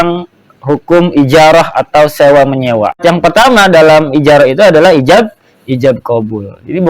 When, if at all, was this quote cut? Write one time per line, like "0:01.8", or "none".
0:03.0